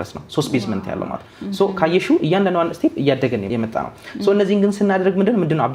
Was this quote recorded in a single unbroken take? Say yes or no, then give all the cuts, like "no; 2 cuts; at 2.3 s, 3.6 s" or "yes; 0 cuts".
yes; 0 cuts